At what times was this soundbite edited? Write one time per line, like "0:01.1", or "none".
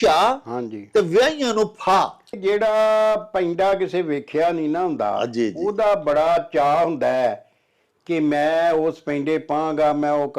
0:02.3

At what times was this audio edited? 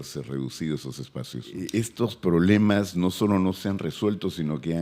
0:01.6

